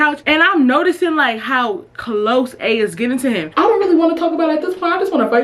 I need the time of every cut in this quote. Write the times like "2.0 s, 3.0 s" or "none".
3.5 s